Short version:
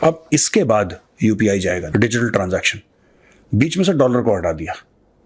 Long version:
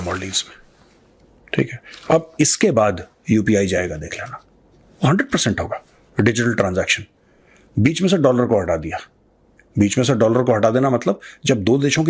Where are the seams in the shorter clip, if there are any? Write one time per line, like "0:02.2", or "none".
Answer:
0:01.9